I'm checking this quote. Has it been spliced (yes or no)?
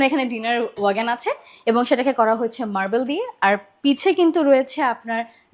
no